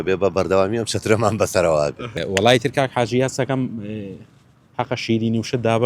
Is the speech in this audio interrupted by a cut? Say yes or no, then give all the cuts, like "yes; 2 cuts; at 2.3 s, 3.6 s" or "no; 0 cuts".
yes; 1 cut; at 2.1 s